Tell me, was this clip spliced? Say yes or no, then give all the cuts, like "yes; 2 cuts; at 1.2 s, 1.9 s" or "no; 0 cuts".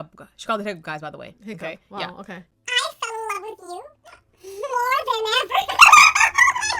yes; 1 cut; at 3.0 s